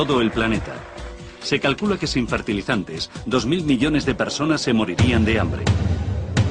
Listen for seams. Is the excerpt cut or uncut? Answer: cut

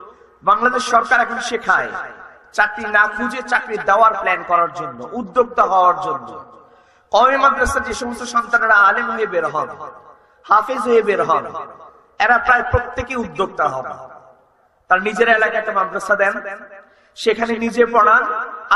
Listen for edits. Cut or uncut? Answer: uncut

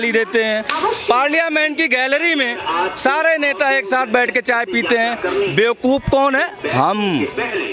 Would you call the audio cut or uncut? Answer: uncut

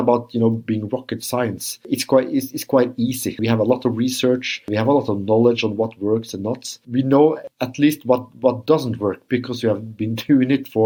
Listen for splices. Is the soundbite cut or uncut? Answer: uncut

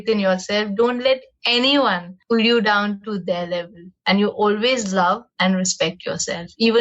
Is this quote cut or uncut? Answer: cut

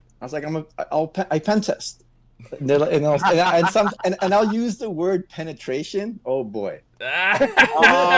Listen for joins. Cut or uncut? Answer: uncut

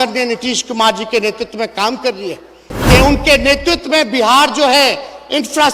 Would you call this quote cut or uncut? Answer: cut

